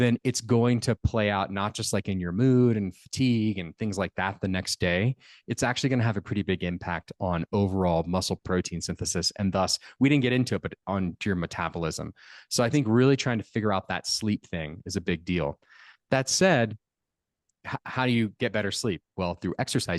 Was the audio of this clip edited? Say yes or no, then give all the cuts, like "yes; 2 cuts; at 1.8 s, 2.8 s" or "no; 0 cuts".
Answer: yes; 1 cut; at 17.6 s